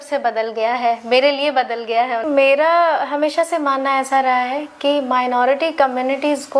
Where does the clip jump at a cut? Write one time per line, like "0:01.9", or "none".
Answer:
0:02.2